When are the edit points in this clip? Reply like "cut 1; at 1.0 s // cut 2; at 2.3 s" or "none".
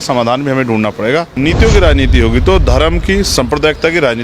cut 1; at 1.3 s